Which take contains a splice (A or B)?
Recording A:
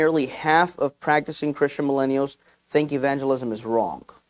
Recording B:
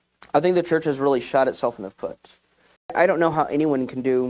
B